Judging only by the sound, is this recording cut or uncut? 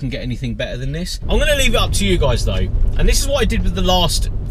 uncut